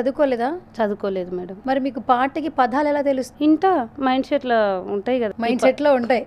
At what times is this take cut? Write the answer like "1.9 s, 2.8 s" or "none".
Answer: 1.5 s, 3.3 s, 5.3 s